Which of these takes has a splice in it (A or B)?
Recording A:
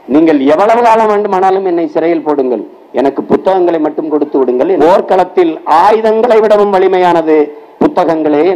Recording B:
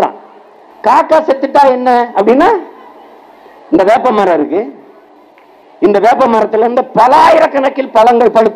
A